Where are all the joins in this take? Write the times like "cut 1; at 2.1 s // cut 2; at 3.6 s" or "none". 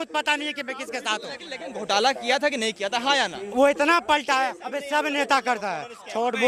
none